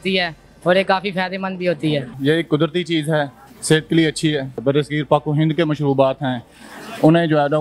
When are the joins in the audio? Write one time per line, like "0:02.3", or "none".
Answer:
0:02.1
0:04.6